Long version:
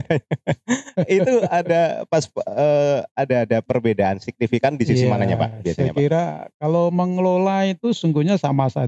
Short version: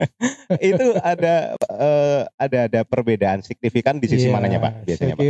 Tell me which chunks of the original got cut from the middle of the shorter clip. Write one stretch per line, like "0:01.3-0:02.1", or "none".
0:02.0-0:02.3